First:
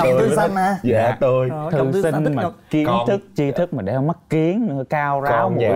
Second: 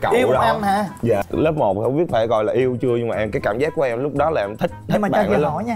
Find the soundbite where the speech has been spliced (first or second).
second